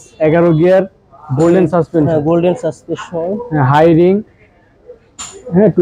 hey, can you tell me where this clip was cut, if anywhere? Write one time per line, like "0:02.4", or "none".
none